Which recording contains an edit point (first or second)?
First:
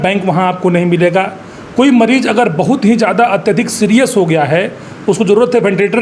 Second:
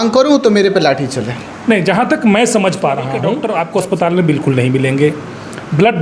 second